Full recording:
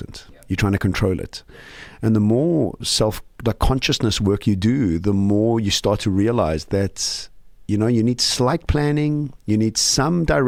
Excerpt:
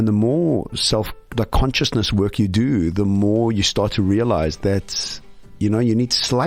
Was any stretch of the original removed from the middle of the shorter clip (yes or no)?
no